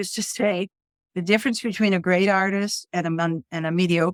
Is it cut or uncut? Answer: uncut